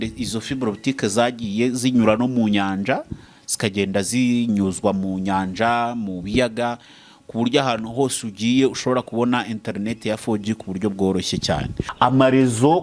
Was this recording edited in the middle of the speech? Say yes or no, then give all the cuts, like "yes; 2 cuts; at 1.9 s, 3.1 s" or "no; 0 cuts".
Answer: yes; 1 cut; at 11.8 s